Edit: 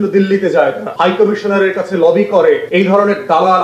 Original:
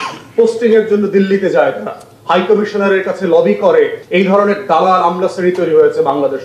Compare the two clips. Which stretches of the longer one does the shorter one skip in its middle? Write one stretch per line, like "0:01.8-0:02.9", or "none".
0:01.9-0:02.2
0:04.0-0:04.1